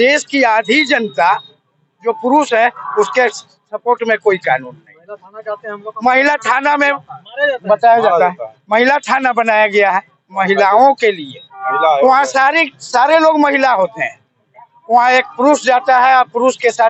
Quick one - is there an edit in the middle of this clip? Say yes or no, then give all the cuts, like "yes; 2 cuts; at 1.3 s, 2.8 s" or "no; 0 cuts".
no; 0 cuts